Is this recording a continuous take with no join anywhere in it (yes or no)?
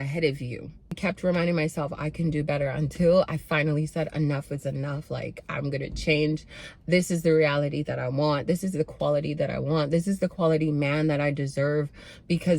no